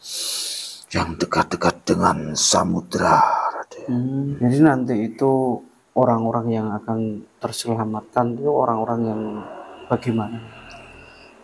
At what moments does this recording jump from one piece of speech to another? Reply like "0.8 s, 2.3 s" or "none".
4.3 s